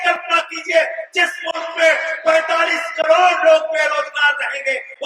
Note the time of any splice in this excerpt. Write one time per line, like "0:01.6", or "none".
none